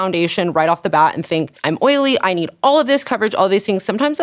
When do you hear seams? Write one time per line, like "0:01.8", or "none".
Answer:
0:01.5